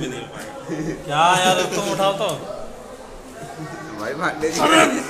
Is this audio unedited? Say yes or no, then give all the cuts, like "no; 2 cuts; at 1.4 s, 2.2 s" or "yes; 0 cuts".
yes; 0 cuts